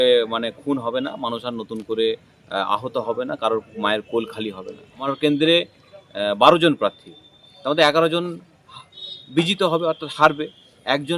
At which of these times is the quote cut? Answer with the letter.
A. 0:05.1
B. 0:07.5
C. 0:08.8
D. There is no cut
A